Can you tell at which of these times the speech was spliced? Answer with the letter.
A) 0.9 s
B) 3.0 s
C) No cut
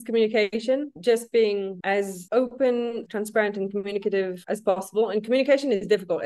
A